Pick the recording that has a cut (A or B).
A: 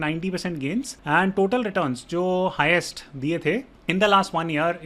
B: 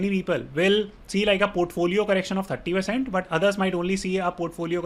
A